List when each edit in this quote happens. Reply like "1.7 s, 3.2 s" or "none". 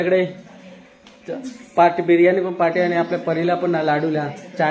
none